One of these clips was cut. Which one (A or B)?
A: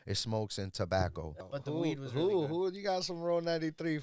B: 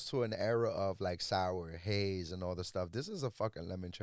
A